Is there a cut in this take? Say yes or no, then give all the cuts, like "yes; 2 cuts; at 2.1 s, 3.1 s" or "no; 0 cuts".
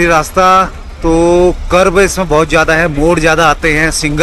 no; 0 cuts